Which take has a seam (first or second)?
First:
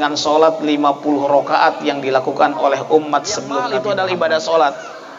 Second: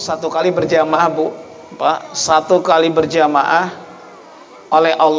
first